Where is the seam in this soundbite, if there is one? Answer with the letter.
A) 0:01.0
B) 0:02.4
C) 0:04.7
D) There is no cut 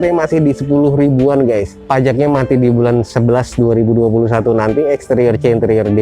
D